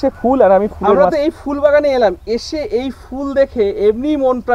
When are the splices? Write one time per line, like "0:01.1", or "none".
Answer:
0:01.0